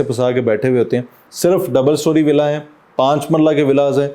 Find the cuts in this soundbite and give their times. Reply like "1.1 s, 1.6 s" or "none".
1.3 s